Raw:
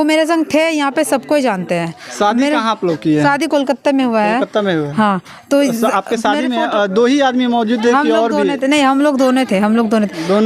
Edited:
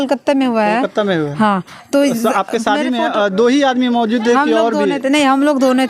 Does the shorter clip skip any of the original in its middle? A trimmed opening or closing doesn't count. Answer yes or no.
no